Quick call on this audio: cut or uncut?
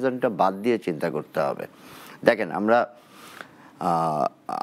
uncut